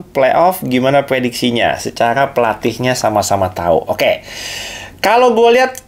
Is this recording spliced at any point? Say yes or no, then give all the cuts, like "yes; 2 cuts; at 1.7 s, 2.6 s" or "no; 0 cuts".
no; 0 cuts